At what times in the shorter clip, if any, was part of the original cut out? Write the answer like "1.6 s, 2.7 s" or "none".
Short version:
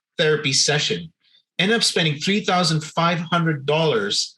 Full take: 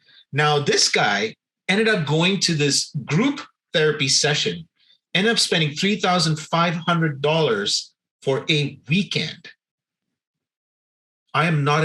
none

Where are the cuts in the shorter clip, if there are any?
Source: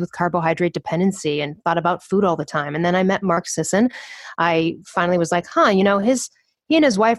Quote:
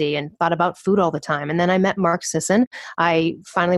2.5 s

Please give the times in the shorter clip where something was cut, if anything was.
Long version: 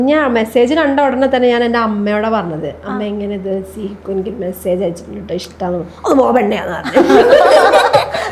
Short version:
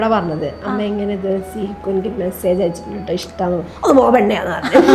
none

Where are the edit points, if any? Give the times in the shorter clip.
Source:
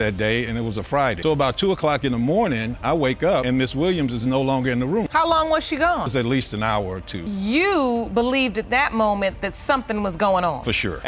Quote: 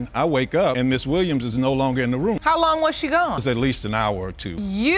none

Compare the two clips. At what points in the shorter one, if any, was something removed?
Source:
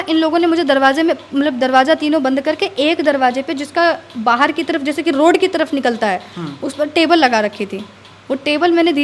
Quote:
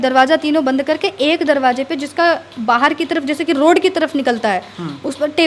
none

